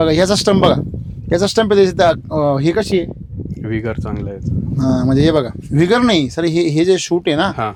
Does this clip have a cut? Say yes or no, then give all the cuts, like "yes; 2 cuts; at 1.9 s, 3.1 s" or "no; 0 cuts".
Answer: no; 0 cuts